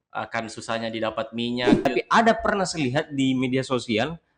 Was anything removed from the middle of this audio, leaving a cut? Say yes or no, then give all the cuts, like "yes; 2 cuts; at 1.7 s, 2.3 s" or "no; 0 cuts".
yes; 1 cut; at 1.8 s